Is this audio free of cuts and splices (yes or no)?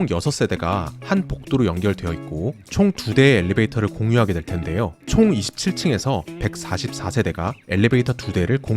yes